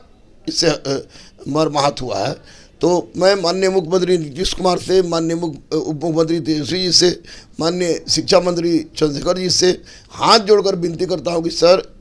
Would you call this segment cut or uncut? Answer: uncut